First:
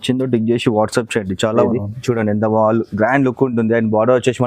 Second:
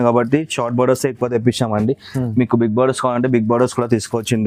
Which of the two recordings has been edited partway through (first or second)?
first